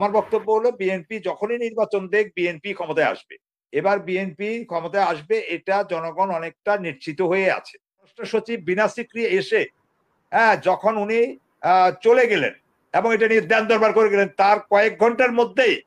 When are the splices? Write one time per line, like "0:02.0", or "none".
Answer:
0:08.2